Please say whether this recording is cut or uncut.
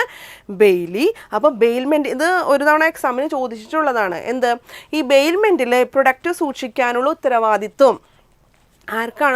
uncut